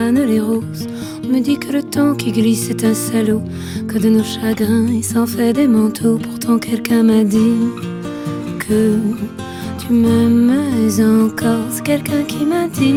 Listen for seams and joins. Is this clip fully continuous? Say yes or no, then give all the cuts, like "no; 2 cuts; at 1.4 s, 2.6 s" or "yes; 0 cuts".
yes; 0 cuts